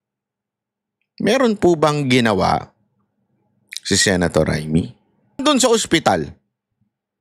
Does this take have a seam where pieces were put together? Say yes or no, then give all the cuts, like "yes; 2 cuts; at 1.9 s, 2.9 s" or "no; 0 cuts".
yes; 1 cut; at 5.4 s